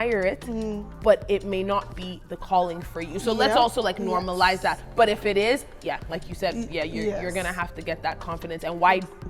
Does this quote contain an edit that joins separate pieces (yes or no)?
no